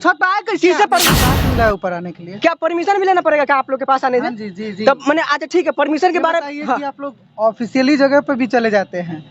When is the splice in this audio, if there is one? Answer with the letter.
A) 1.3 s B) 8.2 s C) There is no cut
A